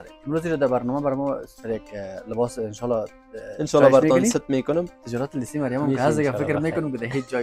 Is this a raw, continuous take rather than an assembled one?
no; 1 cut; at 5.0 s

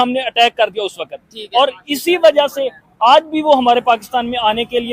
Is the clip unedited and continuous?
yes; 0 cuts

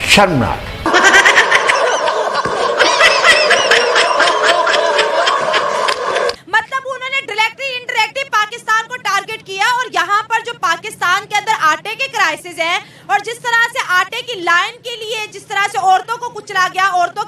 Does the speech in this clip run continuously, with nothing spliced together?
no; 1 cut; at 6.4 s

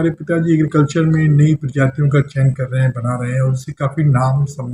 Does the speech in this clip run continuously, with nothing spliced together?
yes; 0 cuts

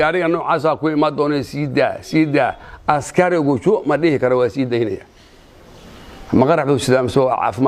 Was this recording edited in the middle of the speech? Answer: no; 0 cuts

